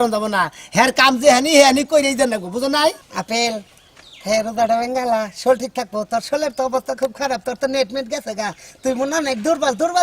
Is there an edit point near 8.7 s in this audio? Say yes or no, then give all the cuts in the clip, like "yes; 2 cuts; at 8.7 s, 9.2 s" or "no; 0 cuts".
no; 1 cut; at 3.1 s